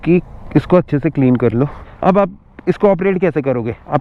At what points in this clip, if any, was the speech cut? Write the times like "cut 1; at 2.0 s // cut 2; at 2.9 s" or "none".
cut 1; at 1.8 s